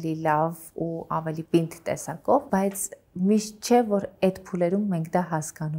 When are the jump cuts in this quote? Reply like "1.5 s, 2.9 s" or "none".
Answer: none